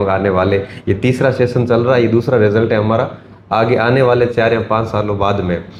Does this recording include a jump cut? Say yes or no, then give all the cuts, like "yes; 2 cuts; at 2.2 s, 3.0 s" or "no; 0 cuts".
no; 0 cuts